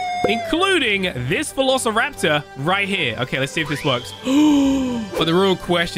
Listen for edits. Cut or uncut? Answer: cut